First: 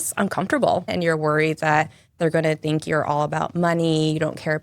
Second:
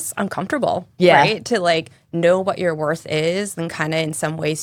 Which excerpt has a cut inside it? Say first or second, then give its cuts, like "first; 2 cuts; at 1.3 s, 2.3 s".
first; 1 cut; at 0.9 s